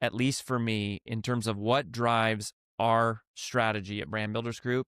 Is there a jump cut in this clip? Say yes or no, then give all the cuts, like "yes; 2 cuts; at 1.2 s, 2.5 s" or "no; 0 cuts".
no; 0 cuts